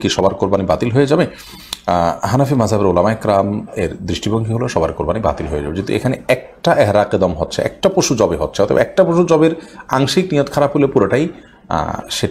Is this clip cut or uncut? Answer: uncut